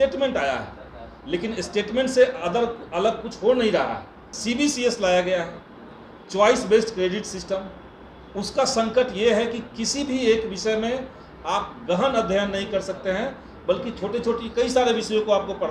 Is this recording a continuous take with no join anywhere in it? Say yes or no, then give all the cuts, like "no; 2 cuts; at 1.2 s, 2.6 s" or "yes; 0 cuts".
no; 1 cut; at 4.3 s